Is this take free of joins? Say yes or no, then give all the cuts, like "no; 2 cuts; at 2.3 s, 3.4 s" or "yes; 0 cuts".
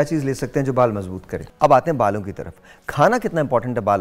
no; 1 cut; at 1.4 s